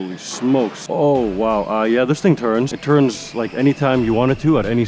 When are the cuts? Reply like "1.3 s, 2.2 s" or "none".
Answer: 0.8 s, 2.8 s